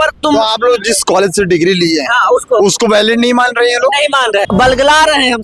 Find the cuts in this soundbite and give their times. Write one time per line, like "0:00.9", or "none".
0:04.4